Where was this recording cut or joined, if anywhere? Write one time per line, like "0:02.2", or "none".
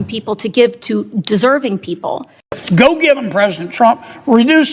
0:02.4